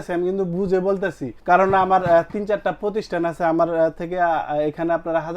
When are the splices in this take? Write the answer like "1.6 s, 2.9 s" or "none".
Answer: 1.3 s